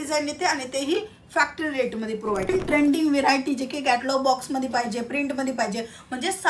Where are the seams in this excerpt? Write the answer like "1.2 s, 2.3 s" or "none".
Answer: 2.5 s